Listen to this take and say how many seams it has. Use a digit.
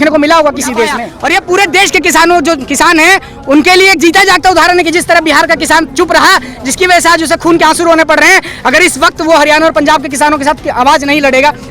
1